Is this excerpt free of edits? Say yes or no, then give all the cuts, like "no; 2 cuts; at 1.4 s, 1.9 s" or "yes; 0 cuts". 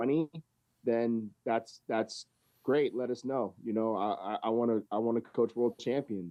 yes; 0 cuts